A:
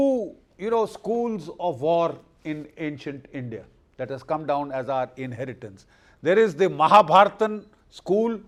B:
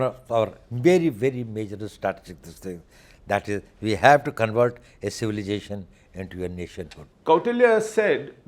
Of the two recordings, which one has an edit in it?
B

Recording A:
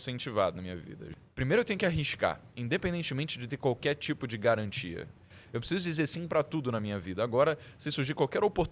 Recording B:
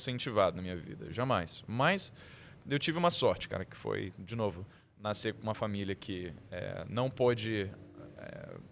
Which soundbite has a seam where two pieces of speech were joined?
A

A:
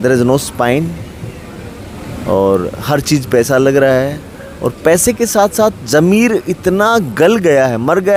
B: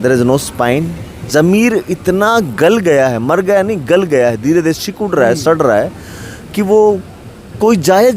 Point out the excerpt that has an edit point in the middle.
B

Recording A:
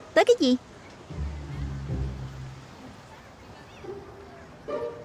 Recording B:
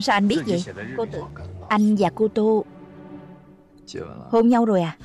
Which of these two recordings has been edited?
B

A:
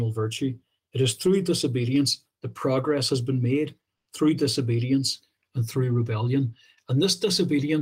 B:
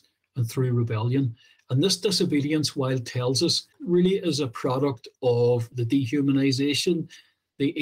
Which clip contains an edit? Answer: B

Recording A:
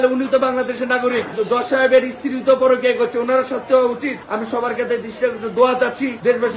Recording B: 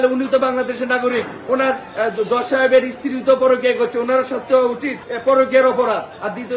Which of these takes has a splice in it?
A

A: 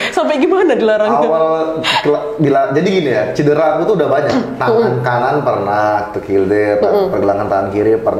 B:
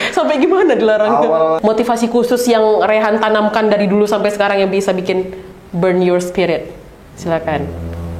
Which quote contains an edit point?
B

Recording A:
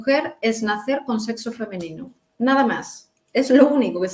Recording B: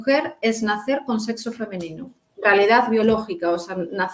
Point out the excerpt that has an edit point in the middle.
B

